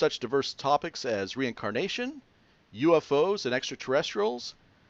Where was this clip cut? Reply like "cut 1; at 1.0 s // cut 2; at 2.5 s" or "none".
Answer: cut 1; at 3.9 s